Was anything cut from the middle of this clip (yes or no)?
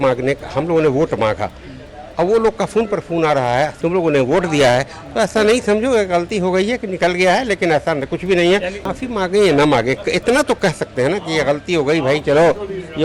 yes